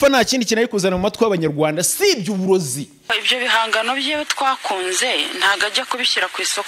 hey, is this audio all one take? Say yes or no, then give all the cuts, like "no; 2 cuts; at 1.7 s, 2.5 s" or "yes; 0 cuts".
no; 1 cut; at 3.1 s